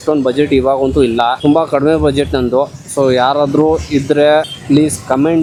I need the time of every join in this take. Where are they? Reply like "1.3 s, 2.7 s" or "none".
none